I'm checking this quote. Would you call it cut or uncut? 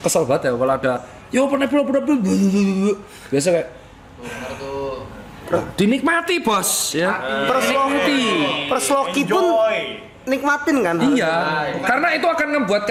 uncut